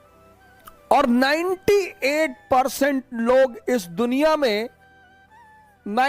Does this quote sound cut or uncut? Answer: uncut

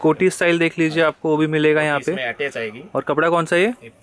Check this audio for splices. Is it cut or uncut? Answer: uncut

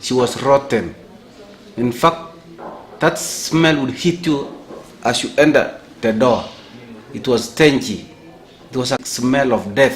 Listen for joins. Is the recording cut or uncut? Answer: cut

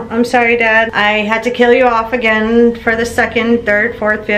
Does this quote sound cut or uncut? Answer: cut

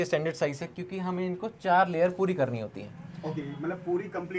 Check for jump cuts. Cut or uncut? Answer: uncut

